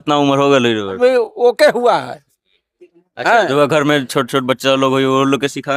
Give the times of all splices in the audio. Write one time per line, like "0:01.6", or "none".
0:01.0